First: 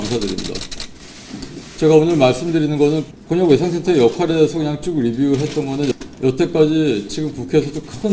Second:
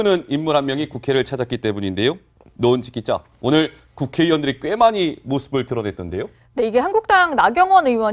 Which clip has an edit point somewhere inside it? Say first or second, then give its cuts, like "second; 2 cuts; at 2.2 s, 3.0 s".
first; 1 cut; at 4.1 s